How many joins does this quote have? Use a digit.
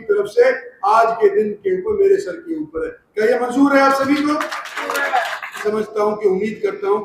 1